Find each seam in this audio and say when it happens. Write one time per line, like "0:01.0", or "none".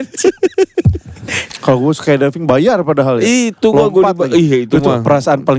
0:01.5